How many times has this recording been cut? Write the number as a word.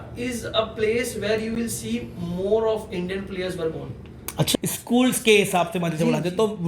one